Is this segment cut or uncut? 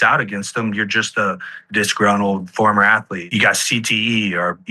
cut